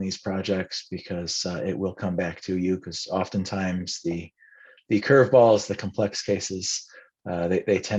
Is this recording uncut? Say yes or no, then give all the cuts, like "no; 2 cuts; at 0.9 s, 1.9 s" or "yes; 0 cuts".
yes; 0 cuts